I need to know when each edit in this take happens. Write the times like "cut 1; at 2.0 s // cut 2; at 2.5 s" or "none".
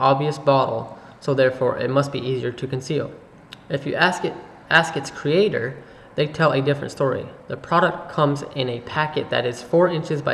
cut 1; at 1.4 s